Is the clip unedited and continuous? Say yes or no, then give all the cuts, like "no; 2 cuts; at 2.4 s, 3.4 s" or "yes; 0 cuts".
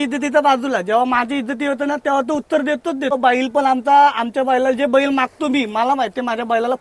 no; 1 cut; at 3.1 s